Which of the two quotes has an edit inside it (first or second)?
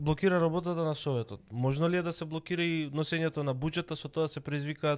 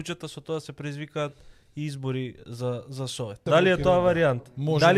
second